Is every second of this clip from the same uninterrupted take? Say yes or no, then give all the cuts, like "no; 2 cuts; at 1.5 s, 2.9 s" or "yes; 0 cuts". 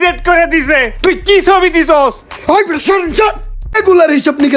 no; 1 cut; at 3.6 s